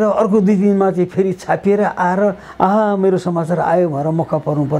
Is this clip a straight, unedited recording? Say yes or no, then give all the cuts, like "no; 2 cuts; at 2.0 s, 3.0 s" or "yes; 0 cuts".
yes; 0 cuts